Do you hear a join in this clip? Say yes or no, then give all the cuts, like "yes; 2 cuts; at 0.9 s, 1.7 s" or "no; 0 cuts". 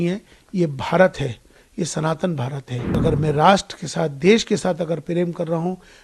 yes; 1 cut; at 3.0 s